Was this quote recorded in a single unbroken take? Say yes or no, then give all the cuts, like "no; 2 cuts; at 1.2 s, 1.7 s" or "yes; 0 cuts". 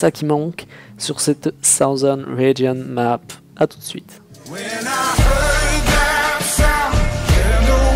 yes; 0 cuts